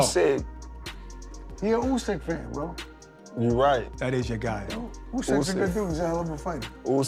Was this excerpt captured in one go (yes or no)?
yes